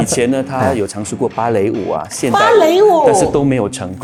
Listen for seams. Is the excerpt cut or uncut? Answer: uncut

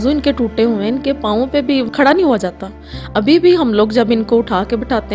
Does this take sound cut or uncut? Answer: cut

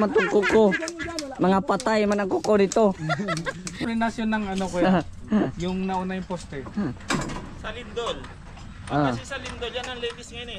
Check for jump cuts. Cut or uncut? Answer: cut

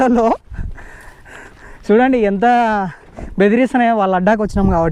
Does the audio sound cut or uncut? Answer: uncut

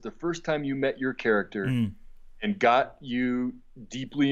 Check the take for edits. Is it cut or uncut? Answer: uncut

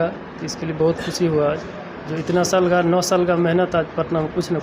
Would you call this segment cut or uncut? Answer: uncut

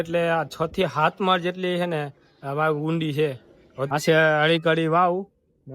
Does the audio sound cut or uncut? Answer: cut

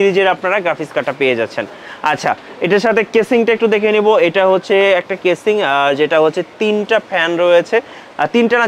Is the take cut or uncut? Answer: uncut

